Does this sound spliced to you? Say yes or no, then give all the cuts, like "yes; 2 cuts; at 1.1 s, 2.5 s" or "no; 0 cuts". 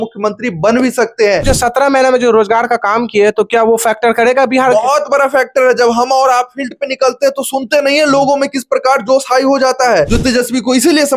yes; 2 cuts; at 1.5 s, 10.1 s